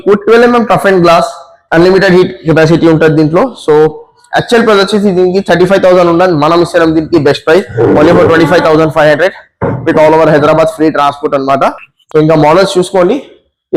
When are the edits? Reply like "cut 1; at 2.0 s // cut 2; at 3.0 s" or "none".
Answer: none